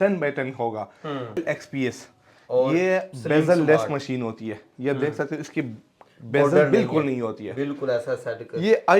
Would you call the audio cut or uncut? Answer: cut